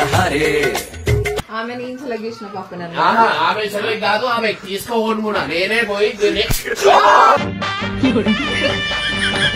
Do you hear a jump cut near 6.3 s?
no; 1 cut; at 1.4 s

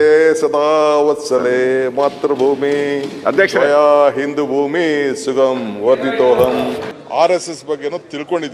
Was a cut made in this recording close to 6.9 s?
yes; 1 cut; at 6.9 s

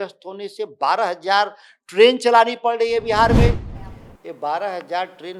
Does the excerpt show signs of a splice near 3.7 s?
yes; 1 cut; at 3.7 s

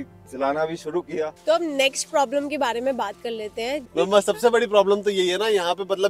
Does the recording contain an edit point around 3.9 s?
yes; 2 cuts; at 1.3 s, 3.9 s

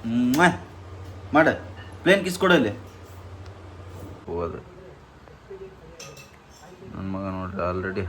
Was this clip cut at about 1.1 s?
no; 1 cut; at 4.2 s

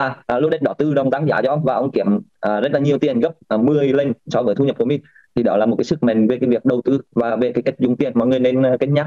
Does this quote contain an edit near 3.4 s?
no; 0 cuts

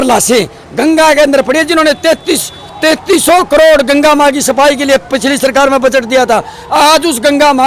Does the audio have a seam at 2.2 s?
no; 0 cuts

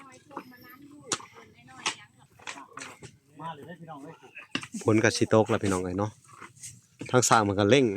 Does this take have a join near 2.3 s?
yes; 1 cut; at 2.3 s

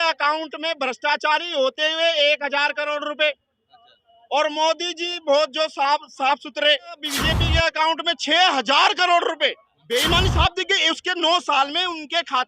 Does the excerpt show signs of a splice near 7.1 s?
yes; 2 cuts; at 7.1 s, 9.7 s

